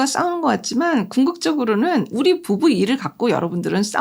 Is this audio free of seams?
no; 1 cut; at 2.1 s

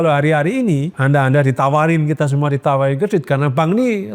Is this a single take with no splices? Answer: no; 1 cut; at 0.9 s

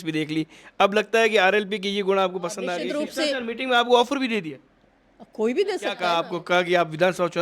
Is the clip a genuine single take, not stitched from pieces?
no; 2 cuts; at 2.8 s, 6.0 s

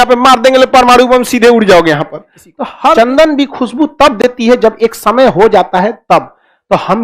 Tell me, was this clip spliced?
yes; 1 cut; at 2.9 s

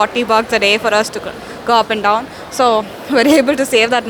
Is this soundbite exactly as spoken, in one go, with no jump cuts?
yes; 0 cuts

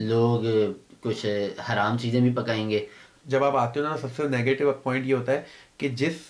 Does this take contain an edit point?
yes; 1 cut; at 3.1 s

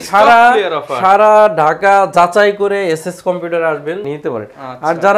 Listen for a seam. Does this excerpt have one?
yes; 1 cut; at 4.1 s

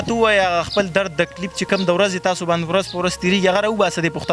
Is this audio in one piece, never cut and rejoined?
yes; 0 cuts

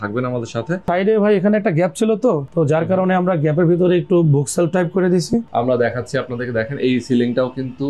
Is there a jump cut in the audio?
yes; 2 cuts; at 0.8 s, 5.5 s

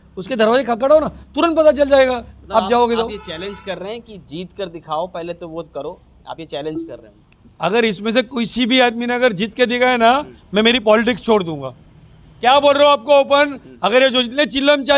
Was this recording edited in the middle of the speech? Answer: no; 0 cuts

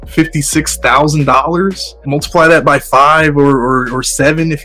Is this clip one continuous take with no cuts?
no; 1 cut; at 1.9 s

